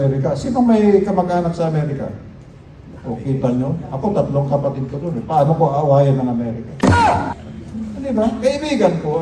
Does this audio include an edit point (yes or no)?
no